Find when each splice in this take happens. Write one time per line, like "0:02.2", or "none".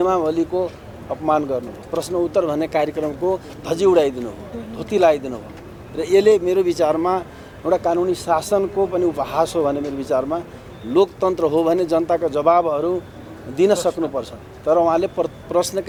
none